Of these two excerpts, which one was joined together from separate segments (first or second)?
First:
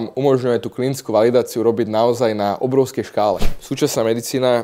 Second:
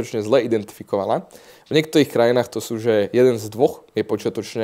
first